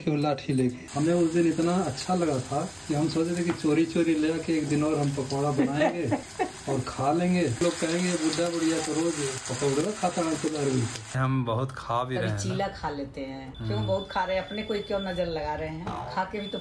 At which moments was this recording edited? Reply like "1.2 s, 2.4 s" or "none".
0.8 s, 7.5 s, 11.1 s